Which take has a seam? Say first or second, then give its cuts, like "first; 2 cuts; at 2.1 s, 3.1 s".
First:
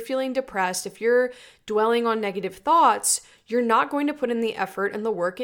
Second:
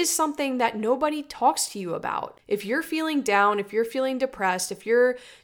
second; 1 cut; at 2.3 s